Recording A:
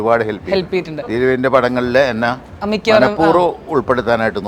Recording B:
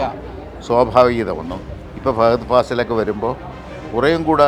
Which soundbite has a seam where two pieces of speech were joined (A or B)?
A